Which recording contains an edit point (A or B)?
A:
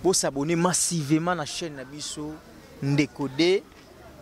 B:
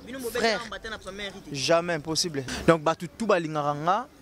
B